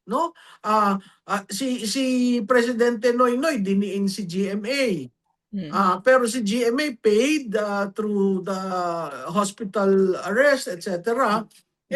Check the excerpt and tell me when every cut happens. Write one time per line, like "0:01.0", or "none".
none